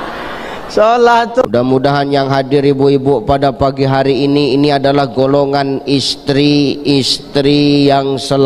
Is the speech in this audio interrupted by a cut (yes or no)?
yes